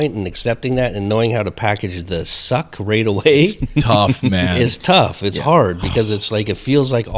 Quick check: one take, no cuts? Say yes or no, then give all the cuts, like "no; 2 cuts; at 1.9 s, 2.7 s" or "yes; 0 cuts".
yes; 0 cuts